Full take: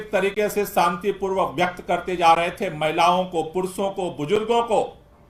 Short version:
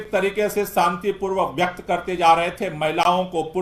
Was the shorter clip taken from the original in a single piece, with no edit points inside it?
yes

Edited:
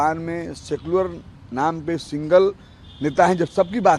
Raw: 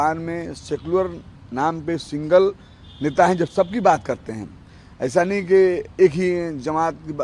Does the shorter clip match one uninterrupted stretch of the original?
yes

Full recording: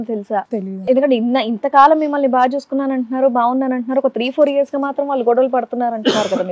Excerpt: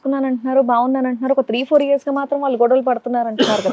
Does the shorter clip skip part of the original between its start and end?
no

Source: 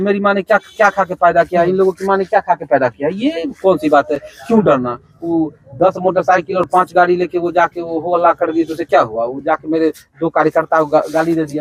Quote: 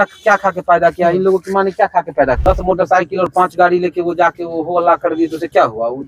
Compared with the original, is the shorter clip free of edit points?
no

